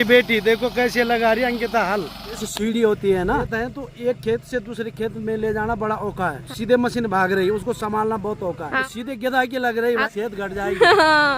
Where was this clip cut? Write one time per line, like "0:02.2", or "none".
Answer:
0:02.5
0:03.5
0:06.4
0:08.8
0:10.0